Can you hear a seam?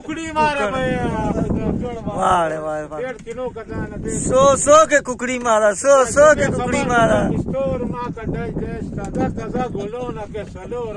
no; 0 cuts

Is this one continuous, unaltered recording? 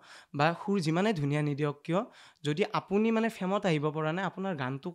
yes; 0 cuts

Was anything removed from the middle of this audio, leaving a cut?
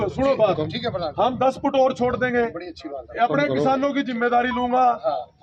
no; 0 cuts

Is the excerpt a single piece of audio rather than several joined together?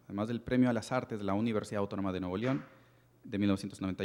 yes; 0 cuts

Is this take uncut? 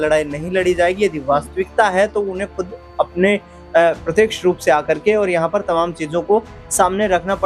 yes; 0 cuts

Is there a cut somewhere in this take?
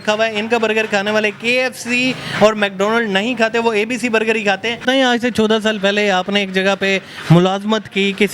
yes; 1 cut; at 4.8 s

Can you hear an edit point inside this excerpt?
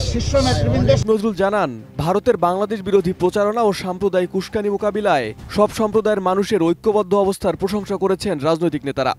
yes; 1 cut; at 1.0 s

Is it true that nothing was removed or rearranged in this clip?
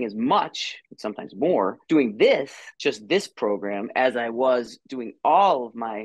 yes; 0 cuts

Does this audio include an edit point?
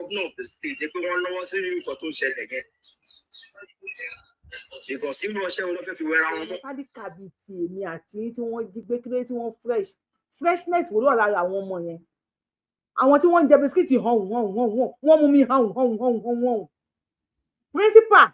yes; 1 cut; at 6.7 s

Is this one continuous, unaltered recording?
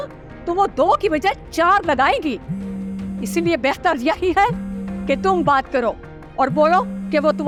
yes; 0 cuts

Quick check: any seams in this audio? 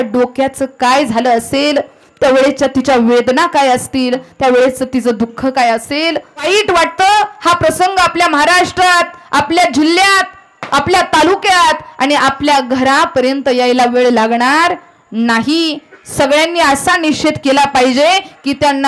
yes; 1 cut; at 6.4 s

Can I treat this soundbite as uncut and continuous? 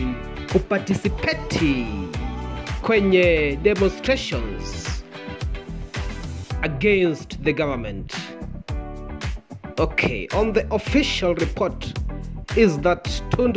no; 2 cuts; at 8.4 s, 9.7 s

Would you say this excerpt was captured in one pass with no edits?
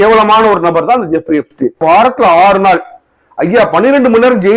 no; 1 cut; at 1.8 s

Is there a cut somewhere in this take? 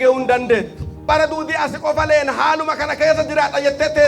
yes; 1 cut; at 1.1 s

